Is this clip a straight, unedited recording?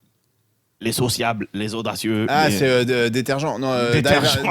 yes; 0 cuts

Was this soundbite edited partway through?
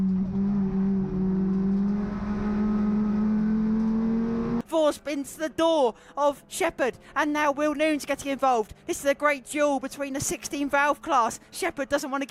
no; 0 cuts

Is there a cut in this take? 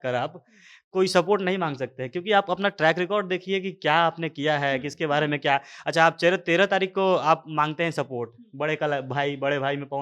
no; 0 cuts

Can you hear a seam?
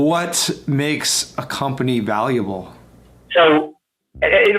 yes; 1 cut; at 2.9 s

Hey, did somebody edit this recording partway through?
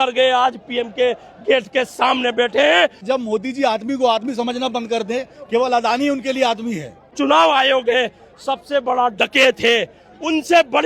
yes; 2 cuts; at 3.0 s, 7.1 s

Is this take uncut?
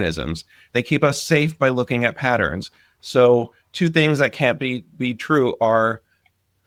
yes; 0 cuts

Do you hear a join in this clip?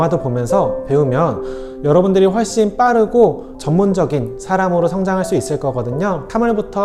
no; 0 cuts

